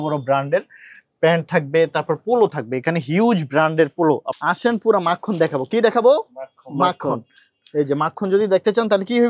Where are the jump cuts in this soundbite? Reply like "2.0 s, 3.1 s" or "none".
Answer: 4.3 s